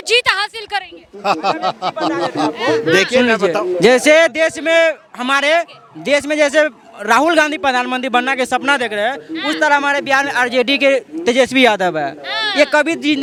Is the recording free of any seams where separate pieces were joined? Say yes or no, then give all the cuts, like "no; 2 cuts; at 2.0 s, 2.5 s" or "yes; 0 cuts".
yes; 0 cuts